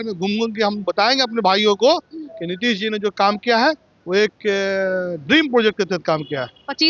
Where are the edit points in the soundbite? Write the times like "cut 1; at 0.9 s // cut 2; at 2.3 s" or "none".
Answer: none